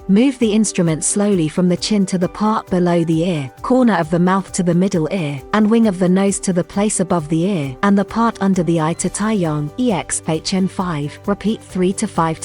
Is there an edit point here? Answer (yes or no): yes